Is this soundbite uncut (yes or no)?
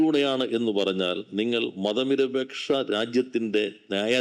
yes